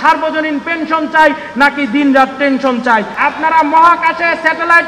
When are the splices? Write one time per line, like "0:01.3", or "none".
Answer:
0:03.1

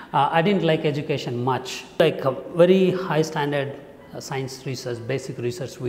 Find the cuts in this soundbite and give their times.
0:02.0

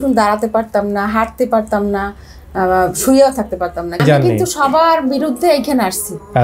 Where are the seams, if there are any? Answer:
0:04.0

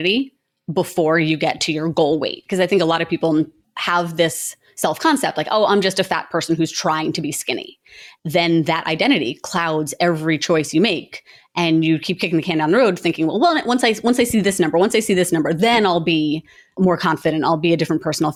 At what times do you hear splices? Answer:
none

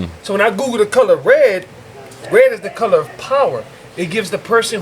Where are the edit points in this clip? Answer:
none

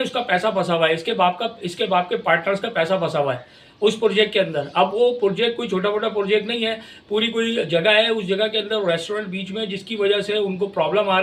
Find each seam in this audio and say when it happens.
none

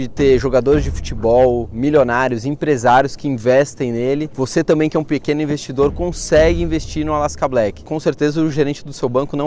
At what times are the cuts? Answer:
0:07.8

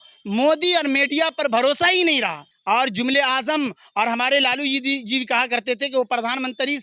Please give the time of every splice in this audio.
0:02.5

